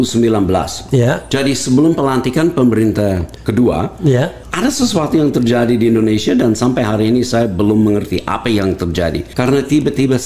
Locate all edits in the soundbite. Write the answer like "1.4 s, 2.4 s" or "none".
3.3 s, 4.4 s, 9.2 s

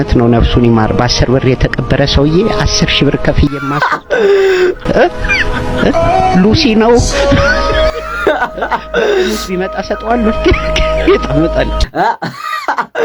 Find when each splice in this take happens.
11.8 s

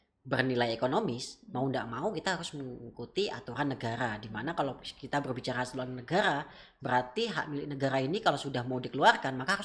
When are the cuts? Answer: none

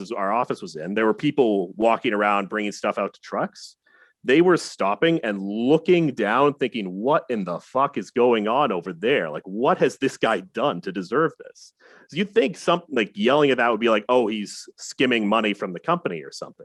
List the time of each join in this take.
none

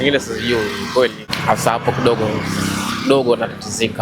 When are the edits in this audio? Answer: 1.3 s

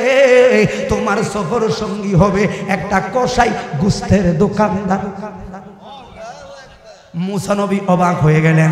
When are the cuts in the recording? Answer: none

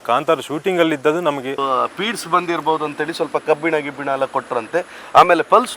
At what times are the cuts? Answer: 1.6 s

